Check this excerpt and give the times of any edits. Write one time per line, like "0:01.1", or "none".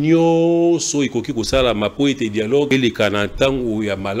0:02.7